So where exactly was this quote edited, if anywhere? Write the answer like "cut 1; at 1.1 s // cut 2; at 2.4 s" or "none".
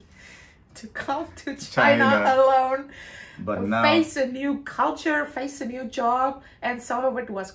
none